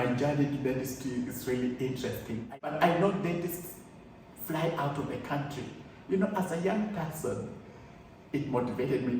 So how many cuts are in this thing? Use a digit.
1